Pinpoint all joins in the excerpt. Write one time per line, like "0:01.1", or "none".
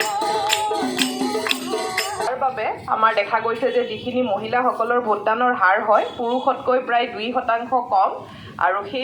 0:02.3

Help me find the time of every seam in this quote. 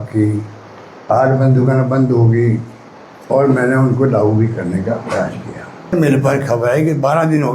0:05.9

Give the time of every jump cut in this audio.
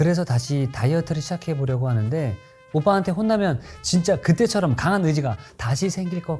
0:02.6

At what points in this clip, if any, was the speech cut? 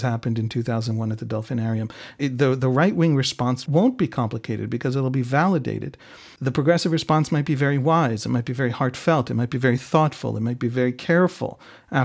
0:02.2
0:03.6
0:06.3

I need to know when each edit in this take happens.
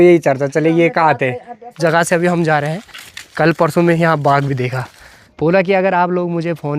0:01.8
0:05.2

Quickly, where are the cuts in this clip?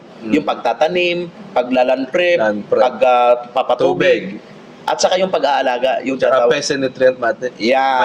none

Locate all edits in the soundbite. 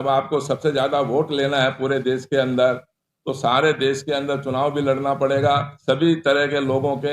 0:05.7

